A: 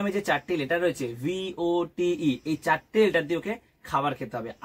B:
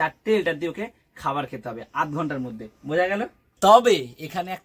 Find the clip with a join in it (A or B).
B